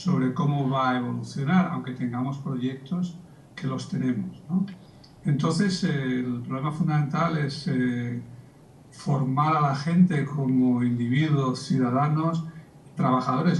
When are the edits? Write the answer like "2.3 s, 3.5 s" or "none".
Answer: 7.4 s